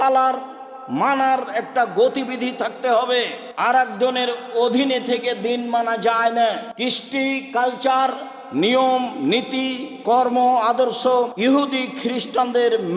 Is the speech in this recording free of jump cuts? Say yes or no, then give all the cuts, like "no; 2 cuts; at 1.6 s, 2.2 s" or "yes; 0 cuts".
no; 3 cuts; at 3.4 s, 6.7 s, 11.3 s